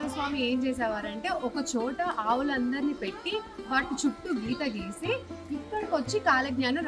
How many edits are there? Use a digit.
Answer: 0